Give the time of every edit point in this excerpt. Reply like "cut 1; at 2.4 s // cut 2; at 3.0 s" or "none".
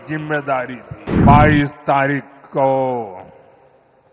cut 1; at 1.1 s